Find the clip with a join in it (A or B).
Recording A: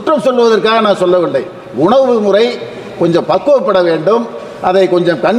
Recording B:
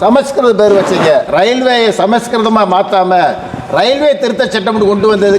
B